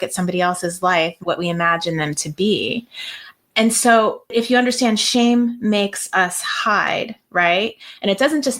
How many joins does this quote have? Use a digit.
1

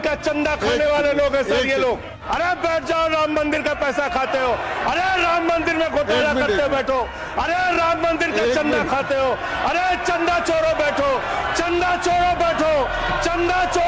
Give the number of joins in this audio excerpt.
1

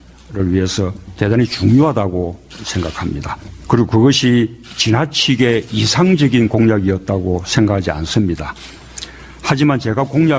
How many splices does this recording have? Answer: 0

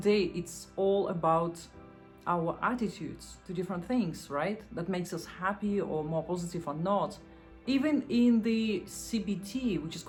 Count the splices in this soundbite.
0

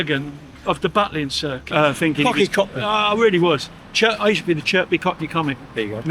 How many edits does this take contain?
1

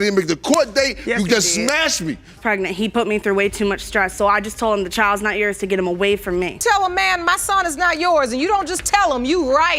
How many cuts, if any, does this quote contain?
1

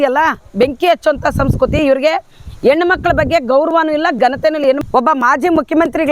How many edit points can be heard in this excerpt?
1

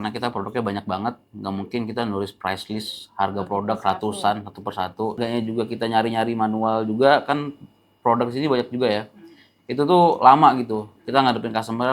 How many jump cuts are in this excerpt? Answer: 1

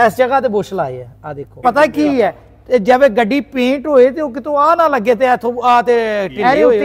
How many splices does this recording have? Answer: 1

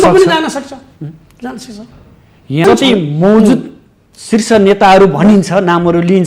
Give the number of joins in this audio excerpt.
1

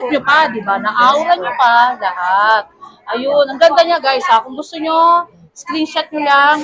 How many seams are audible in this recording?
0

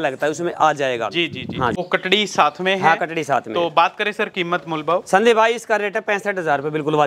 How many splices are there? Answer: 1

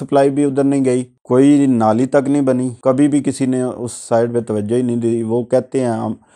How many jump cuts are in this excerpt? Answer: 2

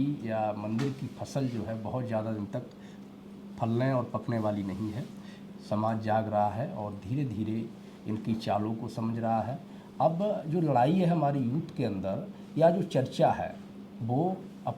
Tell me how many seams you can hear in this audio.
0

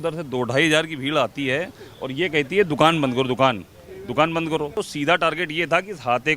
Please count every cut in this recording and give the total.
1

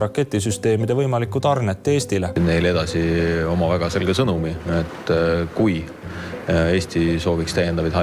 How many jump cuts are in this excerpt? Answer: 1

